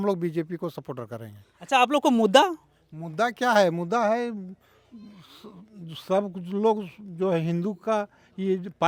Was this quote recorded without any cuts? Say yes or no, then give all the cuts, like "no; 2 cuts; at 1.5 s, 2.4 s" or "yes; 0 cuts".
yes; 0 cuts